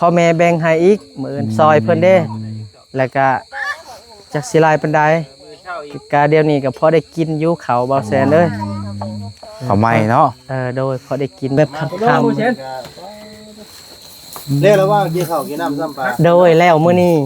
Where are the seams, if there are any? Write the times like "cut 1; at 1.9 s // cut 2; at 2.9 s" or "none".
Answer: cut 1; at 11.6 s